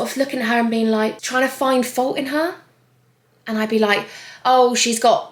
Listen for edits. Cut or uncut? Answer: uncut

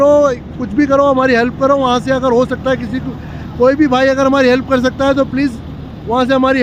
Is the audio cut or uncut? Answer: uncut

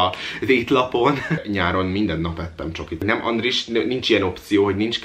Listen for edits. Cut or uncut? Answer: cut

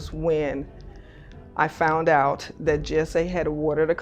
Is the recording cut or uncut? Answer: uncut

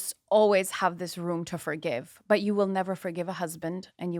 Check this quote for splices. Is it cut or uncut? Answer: uncut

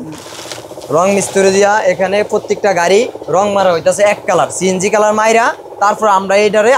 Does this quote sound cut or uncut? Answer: uncut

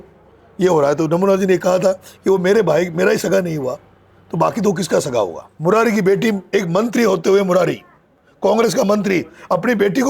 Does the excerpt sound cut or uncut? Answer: cut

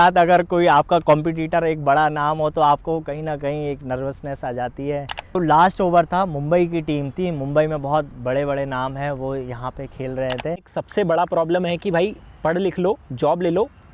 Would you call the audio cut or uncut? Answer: cut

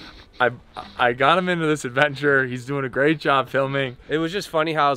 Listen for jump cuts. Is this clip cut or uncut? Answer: cut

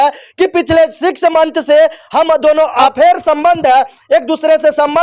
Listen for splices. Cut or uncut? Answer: cut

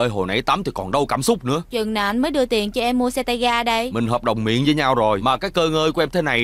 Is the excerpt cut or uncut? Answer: cut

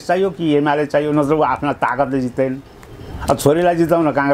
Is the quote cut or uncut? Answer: uncut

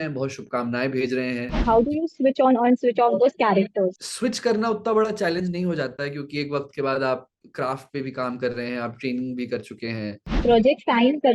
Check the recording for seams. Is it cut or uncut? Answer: cut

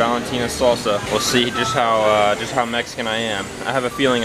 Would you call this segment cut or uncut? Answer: cut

